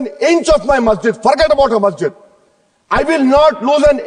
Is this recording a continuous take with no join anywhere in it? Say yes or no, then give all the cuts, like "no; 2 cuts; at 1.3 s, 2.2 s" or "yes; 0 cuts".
yes; 0 cuts